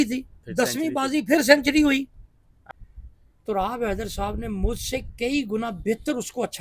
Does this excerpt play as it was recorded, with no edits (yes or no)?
no